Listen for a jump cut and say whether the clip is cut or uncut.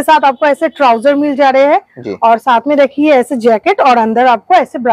uncut